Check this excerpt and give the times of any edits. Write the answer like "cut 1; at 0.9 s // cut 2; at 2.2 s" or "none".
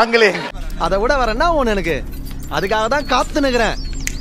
none